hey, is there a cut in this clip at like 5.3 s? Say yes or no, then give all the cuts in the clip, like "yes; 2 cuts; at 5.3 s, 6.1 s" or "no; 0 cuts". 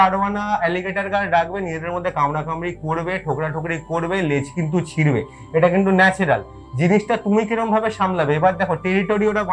no; 0 cuts